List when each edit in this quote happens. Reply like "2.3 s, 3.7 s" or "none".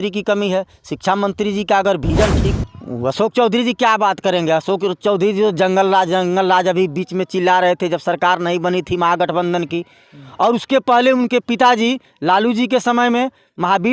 2.5 s